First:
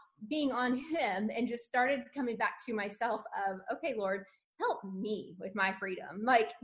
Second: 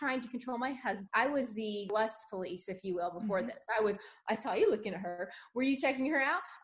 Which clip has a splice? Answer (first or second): second